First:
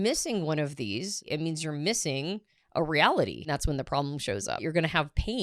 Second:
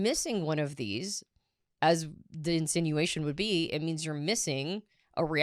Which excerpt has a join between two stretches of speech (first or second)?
first